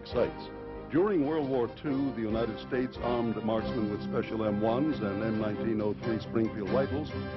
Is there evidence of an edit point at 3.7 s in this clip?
yes; 1 cut; at 3.7 s

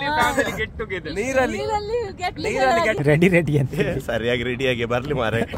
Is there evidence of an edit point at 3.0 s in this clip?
yes; 1 cut; at 3.0 s

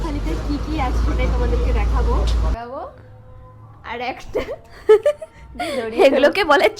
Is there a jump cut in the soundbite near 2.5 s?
yes; 1 cut; at 2.5 s

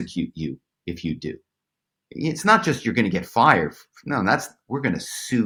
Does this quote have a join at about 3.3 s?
no; 0 cuts

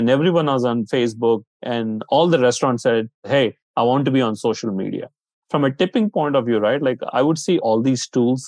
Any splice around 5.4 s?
yes; 4 cuts; at 1.6 s, 3.3 s, 5.4 s, 7.6 s

